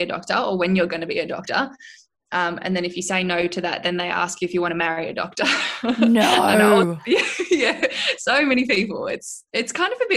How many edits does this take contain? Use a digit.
0